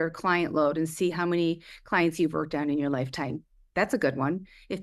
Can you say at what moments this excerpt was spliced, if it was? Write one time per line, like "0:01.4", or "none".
none